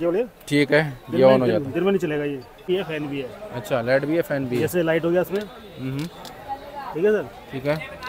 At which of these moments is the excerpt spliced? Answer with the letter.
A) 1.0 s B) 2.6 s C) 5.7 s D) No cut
B